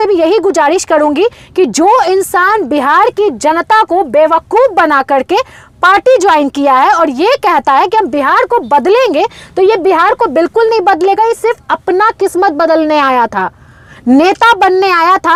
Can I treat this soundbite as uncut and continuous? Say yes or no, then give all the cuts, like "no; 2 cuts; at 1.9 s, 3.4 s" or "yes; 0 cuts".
yes; 0 cuts